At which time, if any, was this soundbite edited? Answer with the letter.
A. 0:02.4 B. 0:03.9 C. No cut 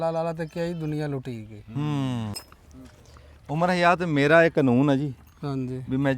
A